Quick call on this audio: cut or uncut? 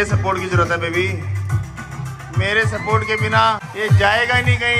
cut